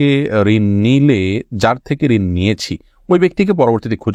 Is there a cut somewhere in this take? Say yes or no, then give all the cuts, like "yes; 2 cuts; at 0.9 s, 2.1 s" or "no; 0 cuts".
no; 0 cuts